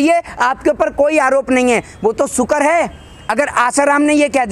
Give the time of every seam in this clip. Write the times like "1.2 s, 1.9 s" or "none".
none